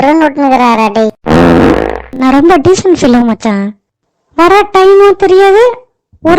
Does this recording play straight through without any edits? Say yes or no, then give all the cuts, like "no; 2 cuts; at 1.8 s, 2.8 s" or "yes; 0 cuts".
no; 1 cut; at 2.0 s